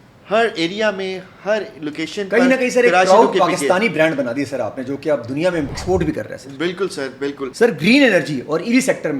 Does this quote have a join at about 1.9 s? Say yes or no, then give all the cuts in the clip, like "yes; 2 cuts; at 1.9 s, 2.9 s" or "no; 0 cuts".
no; 2 cuts; at 5.7 s, 7.5 s